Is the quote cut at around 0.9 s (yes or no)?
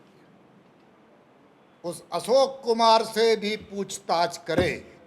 yes